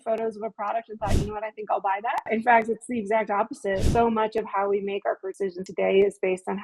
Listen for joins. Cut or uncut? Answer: cut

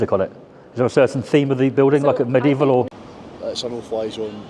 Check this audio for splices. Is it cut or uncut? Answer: cut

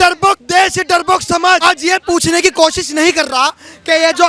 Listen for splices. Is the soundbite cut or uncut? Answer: cut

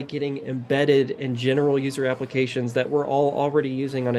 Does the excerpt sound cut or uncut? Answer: uncut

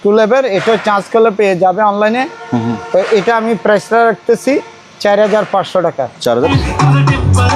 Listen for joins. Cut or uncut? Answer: cut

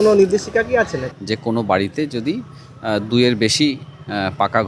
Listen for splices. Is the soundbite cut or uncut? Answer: cut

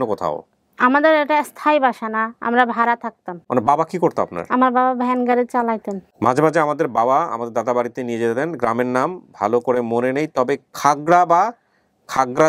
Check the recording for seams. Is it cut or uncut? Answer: cut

